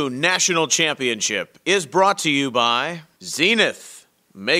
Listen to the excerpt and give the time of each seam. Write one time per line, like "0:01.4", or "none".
0:03.0